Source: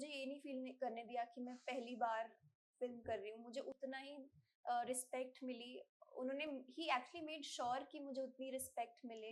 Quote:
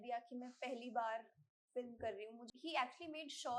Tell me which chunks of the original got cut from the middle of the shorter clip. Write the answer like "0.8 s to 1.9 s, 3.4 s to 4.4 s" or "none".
3.5 s to 6.6 s